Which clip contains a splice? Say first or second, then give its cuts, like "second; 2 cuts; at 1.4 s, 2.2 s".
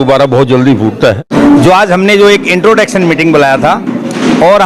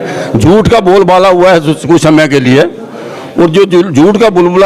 first; 1 cut; at 1.3 s